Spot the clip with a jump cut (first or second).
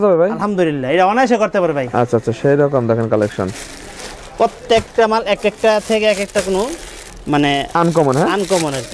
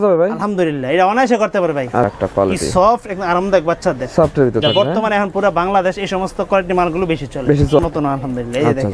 second